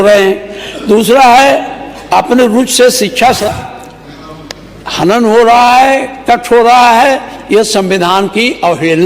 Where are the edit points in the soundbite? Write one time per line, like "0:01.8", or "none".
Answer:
0:03.5

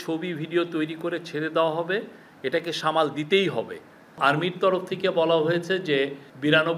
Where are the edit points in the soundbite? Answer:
0:04.0

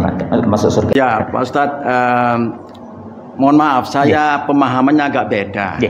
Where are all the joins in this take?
0:00.9

